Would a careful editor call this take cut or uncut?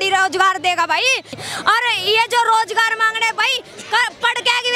uncut